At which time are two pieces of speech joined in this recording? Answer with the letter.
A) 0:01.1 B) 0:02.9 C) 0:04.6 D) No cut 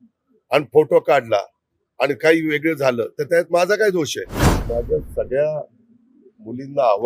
C